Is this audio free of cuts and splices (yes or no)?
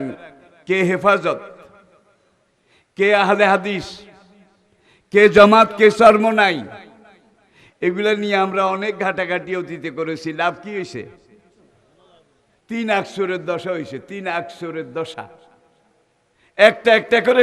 yes